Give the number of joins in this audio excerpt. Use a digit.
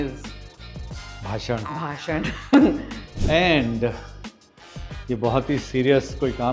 0